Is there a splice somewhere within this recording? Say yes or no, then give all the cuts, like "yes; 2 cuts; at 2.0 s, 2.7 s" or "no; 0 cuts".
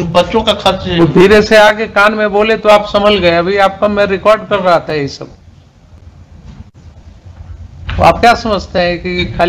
no; 0 cuts